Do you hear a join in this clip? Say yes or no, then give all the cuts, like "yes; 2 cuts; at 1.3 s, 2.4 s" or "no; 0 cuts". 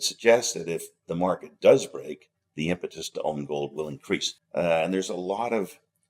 yes; 1 cut; at 4.4 s